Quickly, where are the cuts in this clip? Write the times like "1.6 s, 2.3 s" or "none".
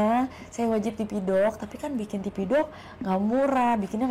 none